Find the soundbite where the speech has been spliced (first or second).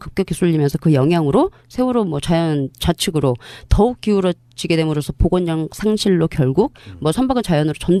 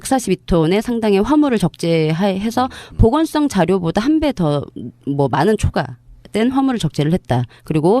second